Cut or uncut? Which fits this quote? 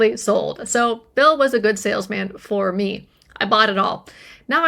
uncut